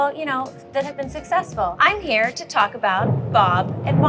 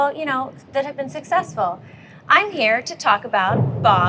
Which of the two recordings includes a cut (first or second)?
first